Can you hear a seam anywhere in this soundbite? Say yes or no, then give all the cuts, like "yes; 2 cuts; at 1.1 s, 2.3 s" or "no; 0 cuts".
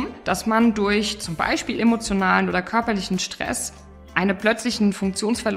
no; 0 cuts